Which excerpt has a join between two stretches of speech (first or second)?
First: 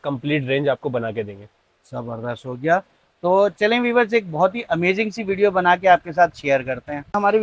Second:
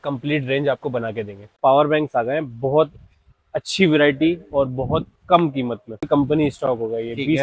second